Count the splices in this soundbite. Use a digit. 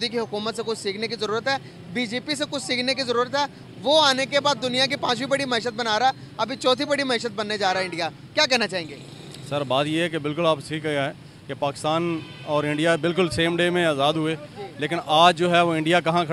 0